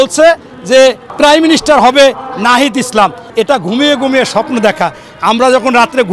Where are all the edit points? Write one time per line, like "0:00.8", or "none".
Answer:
0:01.1
0:03.2